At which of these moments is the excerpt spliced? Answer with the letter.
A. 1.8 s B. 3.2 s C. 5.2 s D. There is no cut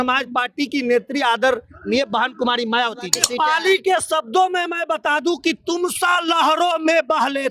B